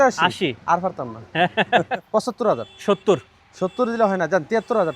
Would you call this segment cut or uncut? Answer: cut